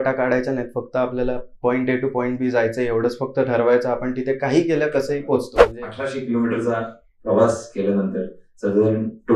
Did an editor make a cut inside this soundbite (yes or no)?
yes